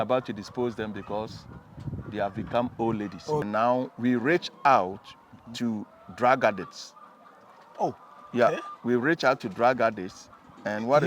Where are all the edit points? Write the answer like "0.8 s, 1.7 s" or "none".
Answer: 3.4 s